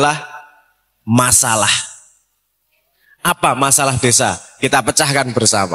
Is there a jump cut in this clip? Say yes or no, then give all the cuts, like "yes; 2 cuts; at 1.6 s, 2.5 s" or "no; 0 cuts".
no; 0 cuts